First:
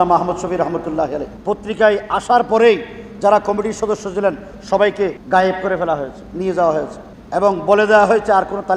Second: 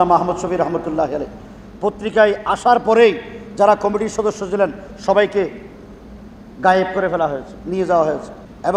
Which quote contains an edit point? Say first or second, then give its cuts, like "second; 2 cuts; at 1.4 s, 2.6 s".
first; 2 cuts; at 1.3 s, 5.2 s